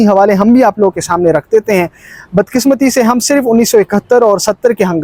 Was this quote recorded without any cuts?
yes; 0 cuts

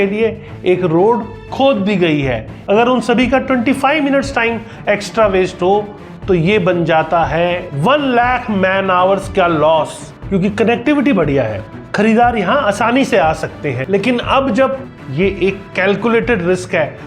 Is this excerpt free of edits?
no; 3 cuts; at 2.5 s, 10.1 s, 14.8 s

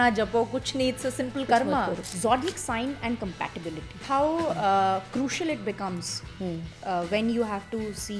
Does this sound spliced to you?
yes; 2 cuts; at 2.1 s, 4.0 s

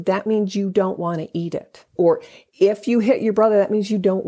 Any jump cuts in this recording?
yes; 1 cut; at 1.9 s

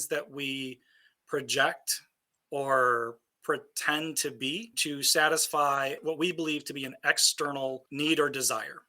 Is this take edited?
yes; 1 cut; at 6.0 s

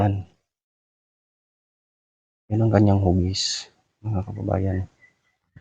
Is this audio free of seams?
yes; 0 cuts

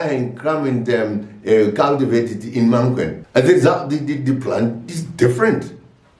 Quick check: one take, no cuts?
no; 1 cut; at 3.2 s

